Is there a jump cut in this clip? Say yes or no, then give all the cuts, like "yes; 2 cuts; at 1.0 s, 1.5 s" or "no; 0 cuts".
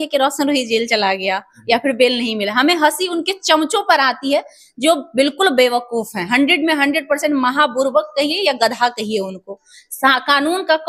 no; 0 cuts